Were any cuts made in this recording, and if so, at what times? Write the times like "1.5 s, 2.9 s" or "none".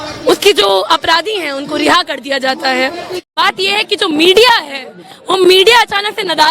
3.1 s

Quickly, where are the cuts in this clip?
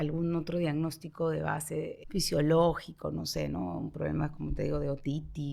2.0 s

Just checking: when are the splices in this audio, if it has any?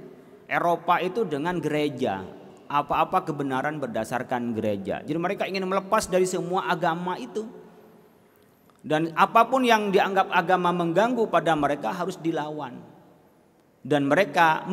none

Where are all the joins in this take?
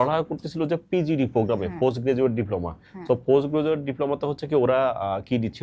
none

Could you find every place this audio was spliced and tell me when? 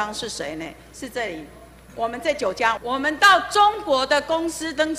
2.8 s

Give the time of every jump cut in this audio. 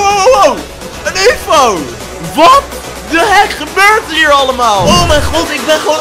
4.8 s

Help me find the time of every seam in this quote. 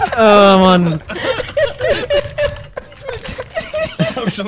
3.4 s

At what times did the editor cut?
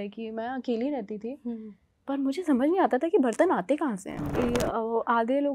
4.2 s

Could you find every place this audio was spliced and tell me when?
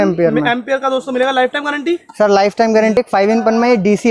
3.0 s

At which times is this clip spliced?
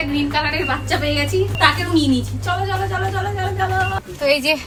none

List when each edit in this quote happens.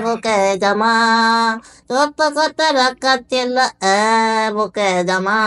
none

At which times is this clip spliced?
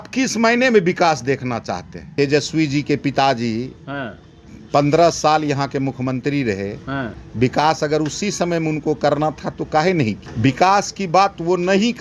2.0 s, 7.2 s, 10.3 s

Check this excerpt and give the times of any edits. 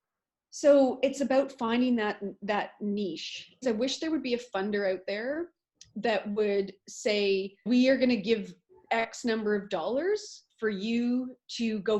3.6 s, 7.7 s

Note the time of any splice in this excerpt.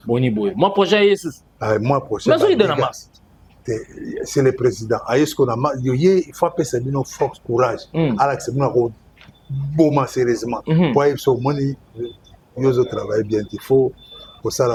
none

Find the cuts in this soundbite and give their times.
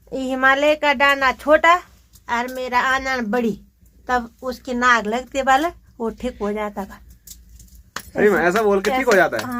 none

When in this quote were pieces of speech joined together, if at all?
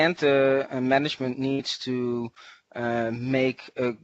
none

